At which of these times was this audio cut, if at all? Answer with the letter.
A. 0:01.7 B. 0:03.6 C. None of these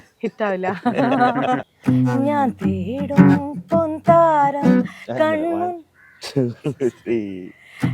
A